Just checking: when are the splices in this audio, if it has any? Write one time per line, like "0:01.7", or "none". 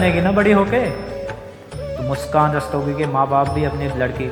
none

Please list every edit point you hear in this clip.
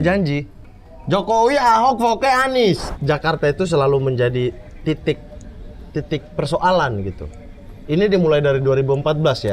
0:02.9

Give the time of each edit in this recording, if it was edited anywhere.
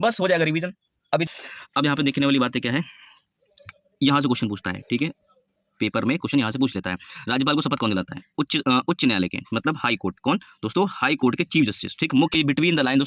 0:01.3
0:12.3

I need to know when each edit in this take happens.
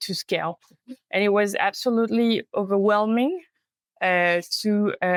none

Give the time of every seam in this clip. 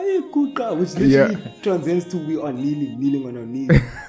none

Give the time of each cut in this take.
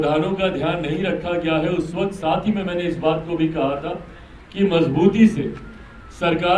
none

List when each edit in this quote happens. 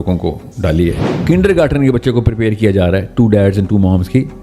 0:01.1

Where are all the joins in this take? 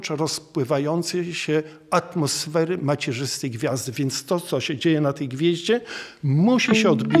none

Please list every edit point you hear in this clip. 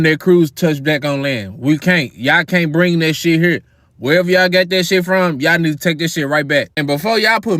none

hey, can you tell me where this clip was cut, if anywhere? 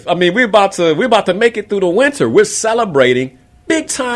none

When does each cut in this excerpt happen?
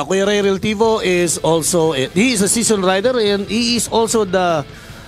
none

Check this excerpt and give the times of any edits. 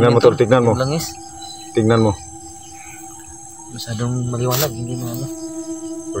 none

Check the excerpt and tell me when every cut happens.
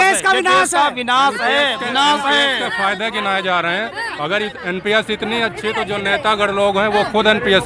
none

